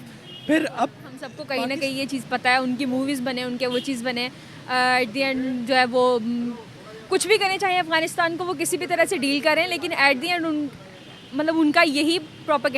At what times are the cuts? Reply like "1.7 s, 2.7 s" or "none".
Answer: 1.3 s